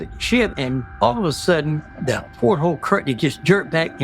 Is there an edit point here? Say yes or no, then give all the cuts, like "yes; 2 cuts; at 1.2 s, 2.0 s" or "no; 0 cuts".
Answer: yes; 2 cuts; at 0.9 s, 1.9 s